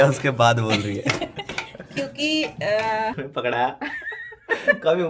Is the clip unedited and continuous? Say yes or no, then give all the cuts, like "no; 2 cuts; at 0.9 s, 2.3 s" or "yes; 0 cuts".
no; 1 cut; at 3.1 s